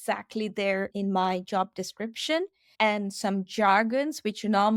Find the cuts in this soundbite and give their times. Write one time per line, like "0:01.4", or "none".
0:00.9
0:02.6

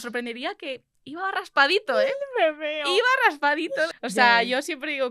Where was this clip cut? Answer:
0:03.9

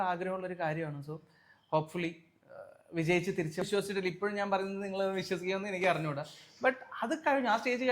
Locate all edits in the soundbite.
0:03.6

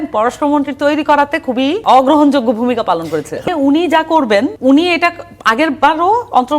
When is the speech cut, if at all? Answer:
0:01.8
0:03.5
0:04.6

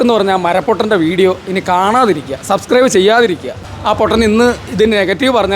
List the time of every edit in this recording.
0:03.6

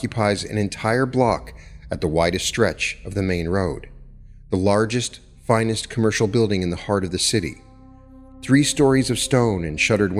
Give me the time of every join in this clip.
none

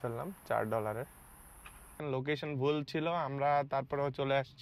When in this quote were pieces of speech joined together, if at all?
0:02.0

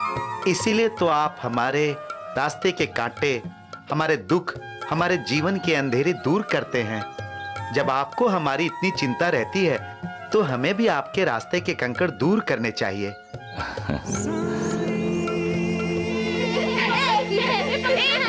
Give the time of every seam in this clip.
none

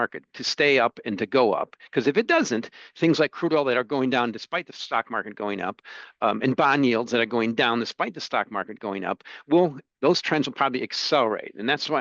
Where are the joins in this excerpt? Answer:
none

